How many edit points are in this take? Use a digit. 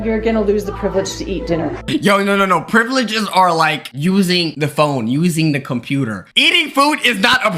2